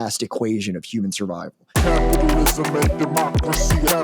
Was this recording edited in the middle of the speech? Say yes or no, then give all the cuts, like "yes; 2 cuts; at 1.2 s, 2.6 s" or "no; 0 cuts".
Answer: yes; 1 cut; at 1.7 s